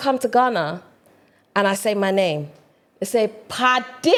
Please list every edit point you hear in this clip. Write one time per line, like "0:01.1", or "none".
none